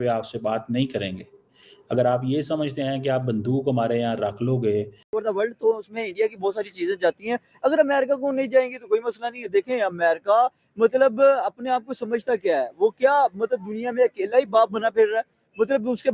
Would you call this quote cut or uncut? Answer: cut